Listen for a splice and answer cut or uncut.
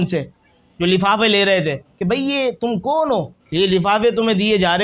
cut